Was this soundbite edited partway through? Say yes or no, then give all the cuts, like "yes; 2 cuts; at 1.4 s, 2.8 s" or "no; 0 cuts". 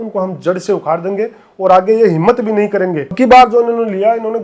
yes; 1 cut; at 3.1 s